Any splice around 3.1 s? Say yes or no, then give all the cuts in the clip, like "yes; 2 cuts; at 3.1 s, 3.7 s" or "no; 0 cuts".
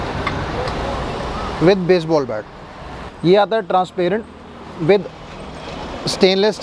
yes; 1 cut; at 3.1 s